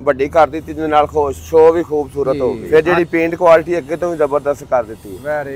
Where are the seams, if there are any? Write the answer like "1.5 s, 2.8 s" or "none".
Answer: 2.6 s